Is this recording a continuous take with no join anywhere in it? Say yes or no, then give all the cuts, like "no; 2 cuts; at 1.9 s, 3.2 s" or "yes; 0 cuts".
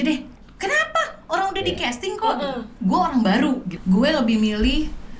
no; 2 cuts; at 2.7 s, 3.7 s